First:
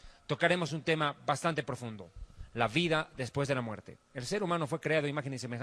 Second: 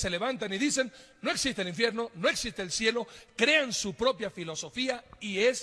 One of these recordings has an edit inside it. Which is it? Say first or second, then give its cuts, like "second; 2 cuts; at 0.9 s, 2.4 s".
first; 1 cut; at 3.8 s